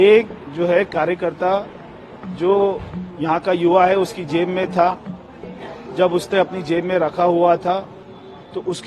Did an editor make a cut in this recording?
no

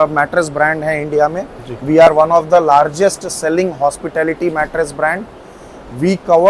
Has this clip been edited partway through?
no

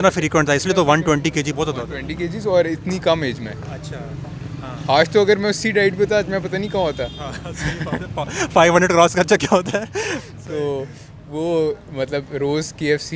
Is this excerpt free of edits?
yes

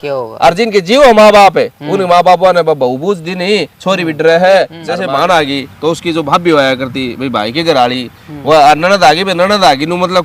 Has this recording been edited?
yes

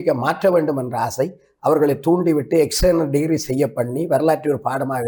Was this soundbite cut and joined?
no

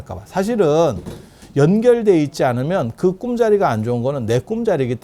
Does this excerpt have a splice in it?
no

